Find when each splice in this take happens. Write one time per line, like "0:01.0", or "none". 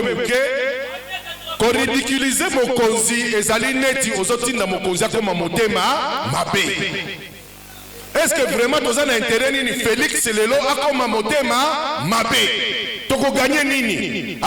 none